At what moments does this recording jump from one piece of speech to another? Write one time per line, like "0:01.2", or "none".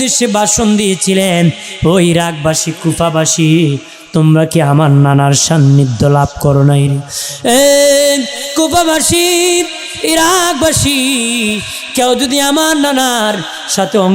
none